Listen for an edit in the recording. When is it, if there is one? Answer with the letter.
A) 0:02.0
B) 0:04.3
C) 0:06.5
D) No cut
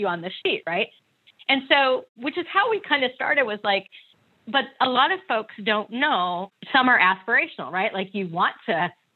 C